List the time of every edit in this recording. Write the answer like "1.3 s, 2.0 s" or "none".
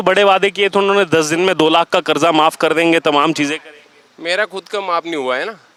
none

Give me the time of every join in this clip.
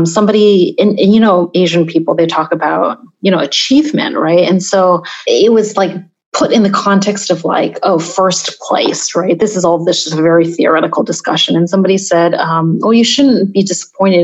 1.5 s, 5.1 s

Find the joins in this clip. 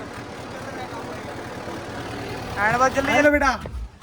3.1 s

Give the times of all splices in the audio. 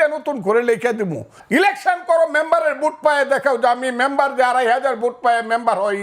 1.3 s

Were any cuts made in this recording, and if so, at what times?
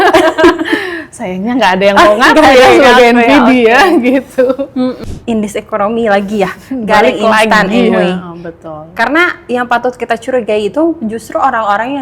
5.0 s

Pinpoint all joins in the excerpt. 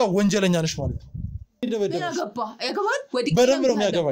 1.6 s

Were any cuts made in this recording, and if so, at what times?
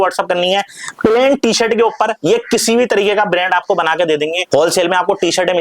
4.4 s

